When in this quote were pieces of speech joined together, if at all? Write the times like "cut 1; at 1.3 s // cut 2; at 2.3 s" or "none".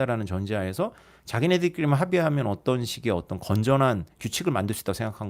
none